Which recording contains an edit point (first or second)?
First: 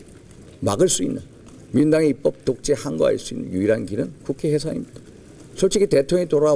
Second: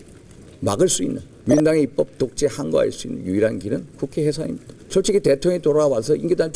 second